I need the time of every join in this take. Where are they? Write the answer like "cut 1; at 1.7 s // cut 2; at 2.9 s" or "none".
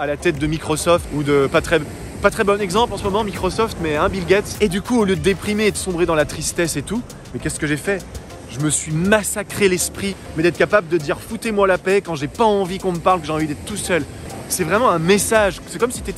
cut 1; at 4.5 s // cut 2; at 10.1 s // cut 3; at 14.2 s

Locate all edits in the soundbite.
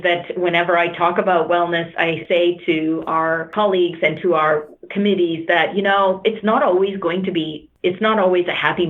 cut 1; at 2.2 s // cut 2; at 3.5 s // cut 3; at 7.6 s

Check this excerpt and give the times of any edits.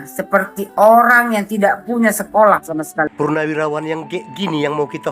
cut 1; at 3.1 s

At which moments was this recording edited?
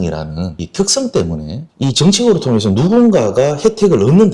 cut 1; at 1.7 s

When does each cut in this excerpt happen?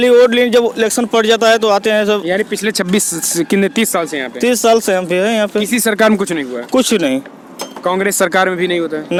none

